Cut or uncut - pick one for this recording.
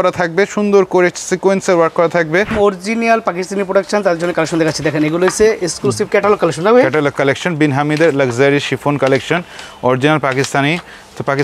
cut